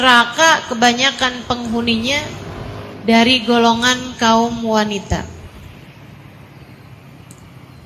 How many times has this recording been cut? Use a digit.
0